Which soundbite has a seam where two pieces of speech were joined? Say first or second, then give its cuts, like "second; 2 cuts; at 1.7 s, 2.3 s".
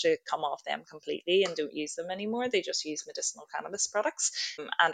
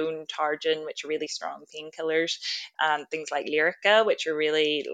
second; 1 cut; at 2.6 s